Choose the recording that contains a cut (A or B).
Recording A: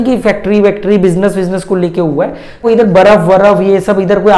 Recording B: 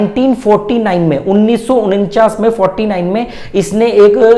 A